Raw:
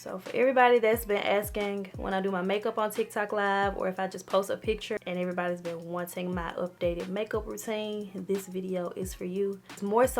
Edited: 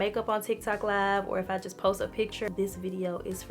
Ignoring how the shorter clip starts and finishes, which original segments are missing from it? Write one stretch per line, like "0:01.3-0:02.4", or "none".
0:05.0-0:08.2